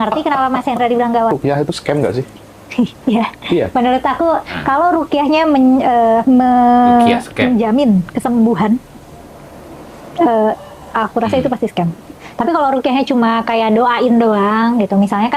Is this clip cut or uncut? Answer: cut